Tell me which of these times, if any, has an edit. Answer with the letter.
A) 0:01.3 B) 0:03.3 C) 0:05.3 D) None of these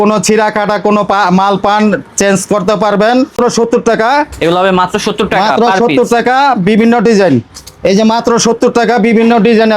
B